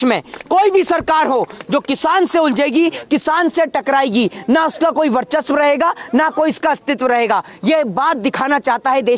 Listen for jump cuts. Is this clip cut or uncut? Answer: uncut